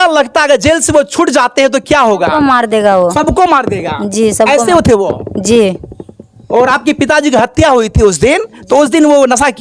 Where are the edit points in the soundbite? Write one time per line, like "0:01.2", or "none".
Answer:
none